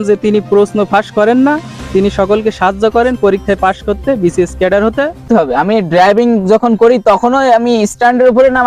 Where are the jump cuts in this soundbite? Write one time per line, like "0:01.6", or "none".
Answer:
0:05.2